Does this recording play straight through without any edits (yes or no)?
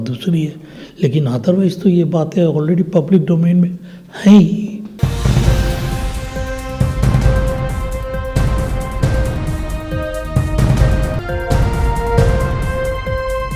yes